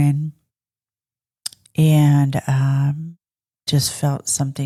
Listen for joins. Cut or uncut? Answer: uncut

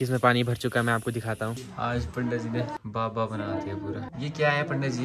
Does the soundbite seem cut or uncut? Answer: cut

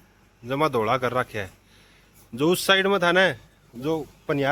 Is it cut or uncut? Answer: uncut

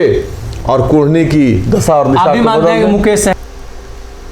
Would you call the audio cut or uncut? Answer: cut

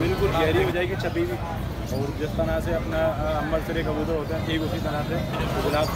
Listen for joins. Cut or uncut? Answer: uncut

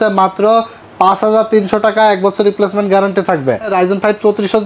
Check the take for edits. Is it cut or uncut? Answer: cut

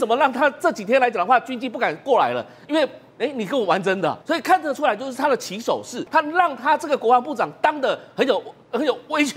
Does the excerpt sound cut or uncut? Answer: cut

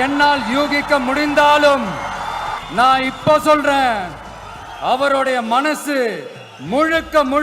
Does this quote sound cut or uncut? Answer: cut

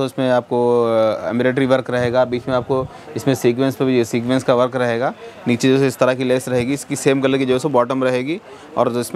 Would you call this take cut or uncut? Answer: uncut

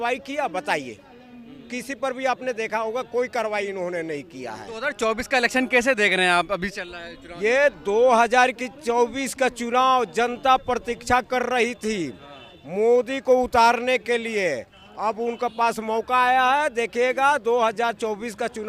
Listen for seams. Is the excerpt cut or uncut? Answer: uncut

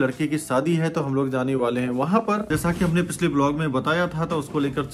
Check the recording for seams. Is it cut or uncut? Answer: uncut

